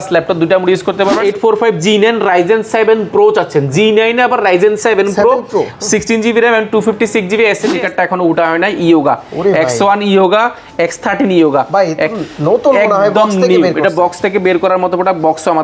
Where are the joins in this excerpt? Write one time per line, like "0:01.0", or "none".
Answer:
0:01.2
0:07.6